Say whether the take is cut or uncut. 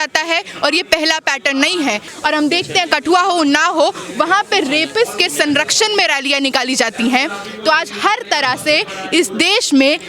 cut